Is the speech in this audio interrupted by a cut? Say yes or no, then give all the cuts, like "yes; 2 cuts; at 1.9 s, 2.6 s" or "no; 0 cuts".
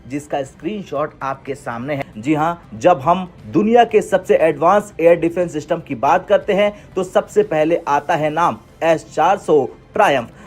yes; 1 cut; at 2.1 s